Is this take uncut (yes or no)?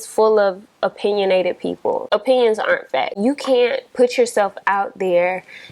no